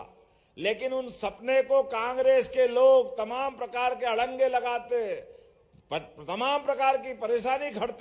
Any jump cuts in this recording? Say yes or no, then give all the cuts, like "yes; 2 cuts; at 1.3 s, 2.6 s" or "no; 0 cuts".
no; 0 cuts